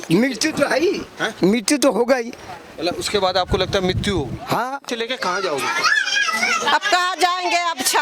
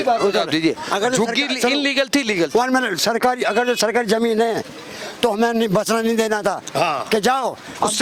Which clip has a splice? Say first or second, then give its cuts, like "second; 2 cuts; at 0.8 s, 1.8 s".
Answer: first; 1 cut; at 4.9 s